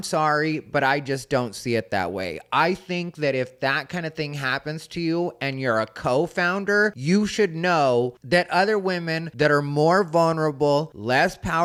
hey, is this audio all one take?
yes; 0 cuts

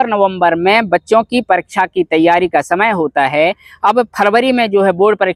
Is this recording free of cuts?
yes; 0 cuts

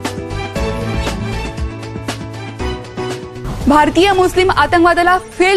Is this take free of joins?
no; 1 cut; at 1.1 s

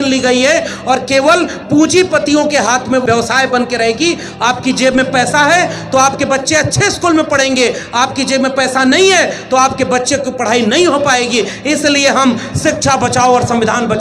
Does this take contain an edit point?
yes; 1 cut; at 3.0 s

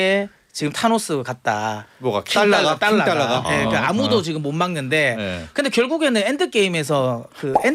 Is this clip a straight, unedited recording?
yes; 0 cuts

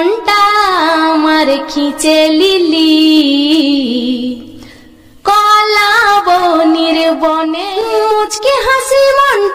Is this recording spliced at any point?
yes; 1 cut; at 7.6 s

